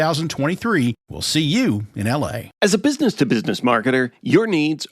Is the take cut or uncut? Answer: cut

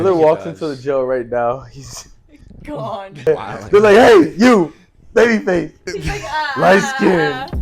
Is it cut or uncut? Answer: cut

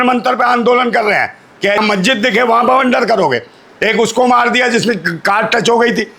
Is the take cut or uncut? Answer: cut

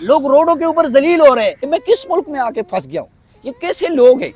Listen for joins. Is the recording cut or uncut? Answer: cut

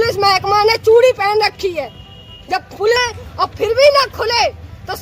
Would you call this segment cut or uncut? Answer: cut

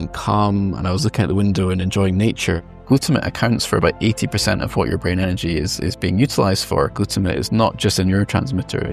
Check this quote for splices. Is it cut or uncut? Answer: cut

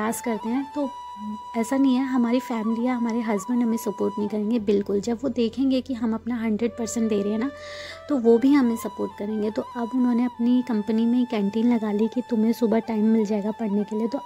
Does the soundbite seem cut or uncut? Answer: uncut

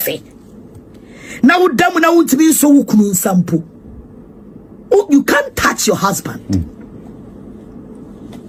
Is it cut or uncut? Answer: uncut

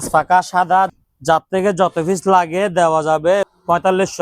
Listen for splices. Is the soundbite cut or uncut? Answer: cut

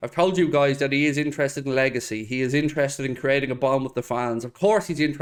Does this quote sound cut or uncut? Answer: uncut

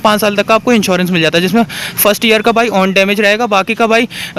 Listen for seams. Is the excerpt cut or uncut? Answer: uncut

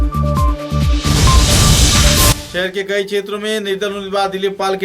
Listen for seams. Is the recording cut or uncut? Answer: cut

